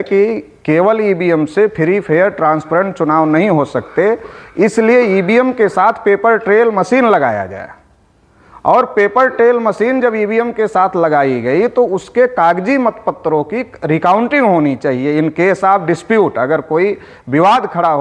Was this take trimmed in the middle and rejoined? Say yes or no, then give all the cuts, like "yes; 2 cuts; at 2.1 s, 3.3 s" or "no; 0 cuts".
no; 0 cuts